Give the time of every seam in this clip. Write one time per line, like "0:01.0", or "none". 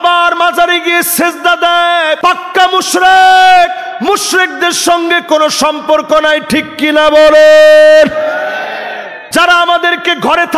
0:02.2
0:09.2